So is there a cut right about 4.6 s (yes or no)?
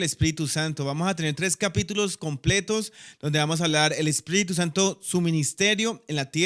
no